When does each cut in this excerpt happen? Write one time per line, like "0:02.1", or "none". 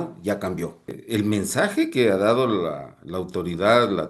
0:01.0